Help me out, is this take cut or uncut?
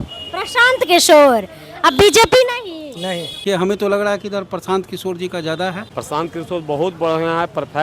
cut